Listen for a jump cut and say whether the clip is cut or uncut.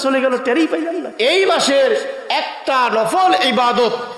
cut